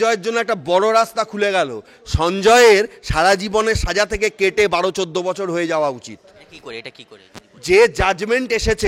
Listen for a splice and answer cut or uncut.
uncut